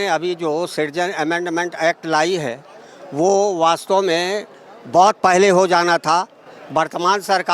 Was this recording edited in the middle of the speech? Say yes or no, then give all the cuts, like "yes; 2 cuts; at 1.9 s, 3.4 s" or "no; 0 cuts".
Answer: no; 0 cuts